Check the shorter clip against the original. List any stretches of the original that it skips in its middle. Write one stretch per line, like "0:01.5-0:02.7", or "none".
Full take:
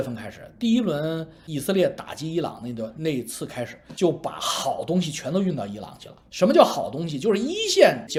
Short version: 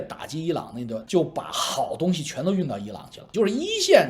0:02.9-0:03.9
0:06.1-0:07.1